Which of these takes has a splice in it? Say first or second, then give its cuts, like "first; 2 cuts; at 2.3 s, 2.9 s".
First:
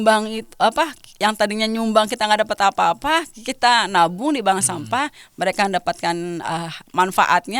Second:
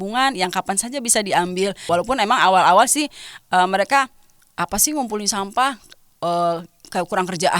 second; 1 cut; at 1.8 s